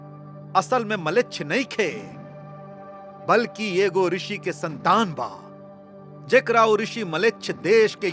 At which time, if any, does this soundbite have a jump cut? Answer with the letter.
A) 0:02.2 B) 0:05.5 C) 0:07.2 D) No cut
D